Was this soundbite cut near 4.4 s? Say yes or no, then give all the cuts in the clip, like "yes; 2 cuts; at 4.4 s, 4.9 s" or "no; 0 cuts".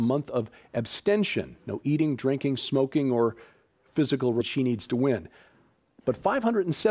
no; 0 cuts